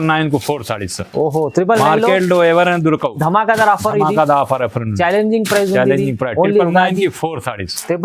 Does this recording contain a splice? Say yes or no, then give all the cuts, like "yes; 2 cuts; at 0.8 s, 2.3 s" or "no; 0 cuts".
no; 0 cuts